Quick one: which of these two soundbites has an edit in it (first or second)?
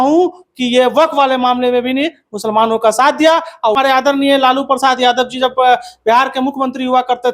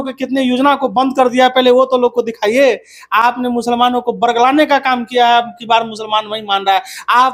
first